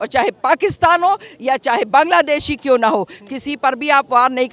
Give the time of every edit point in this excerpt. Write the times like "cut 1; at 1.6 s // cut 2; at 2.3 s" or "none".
none